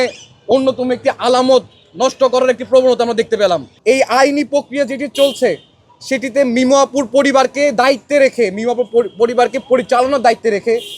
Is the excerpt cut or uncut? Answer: cut